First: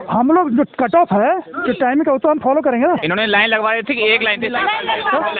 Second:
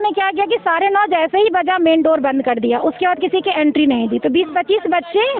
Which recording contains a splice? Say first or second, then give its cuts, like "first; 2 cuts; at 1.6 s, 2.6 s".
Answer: first; 1 cut; at 3.0 s